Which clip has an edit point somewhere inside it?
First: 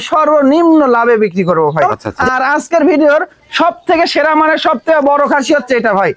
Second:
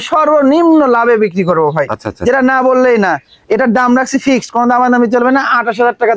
first; 1 cut; at 2.0 s

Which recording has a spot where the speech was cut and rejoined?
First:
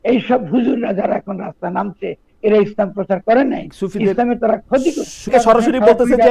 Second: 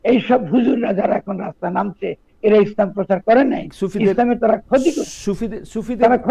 first; 1 cut; at 5.3 s

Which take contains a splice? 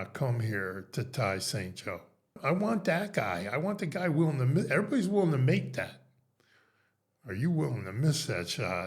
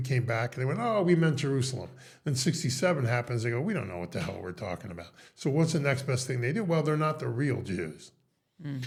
first; 1 cut; at 2.4 s

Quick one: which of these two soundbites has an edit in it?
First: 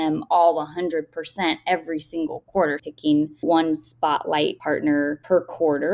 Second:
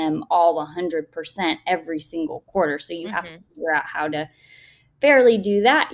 first; 1 cut; at 2.9 s

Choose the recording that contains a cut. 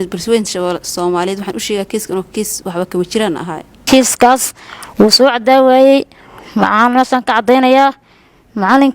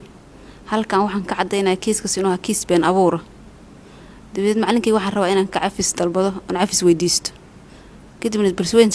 first; 1 cut; at 3.8 s

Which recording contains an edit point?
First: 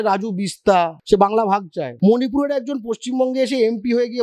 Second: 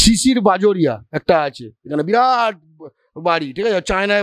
first; 2 cuts; at 1.0 s, 1.8 s

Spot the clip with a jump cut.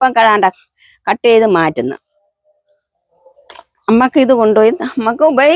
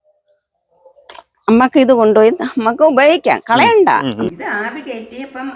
second; 1 cut; at 4.3 s

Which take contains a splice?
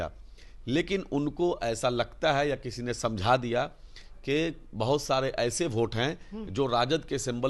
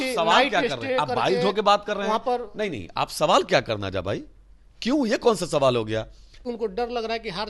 second; 1 cut; at 6.4 s

